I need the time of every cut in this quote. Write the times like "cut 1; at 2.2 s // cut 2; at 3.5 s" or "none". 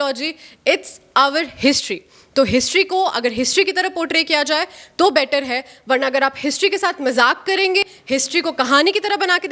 cut 1; at 8.0 s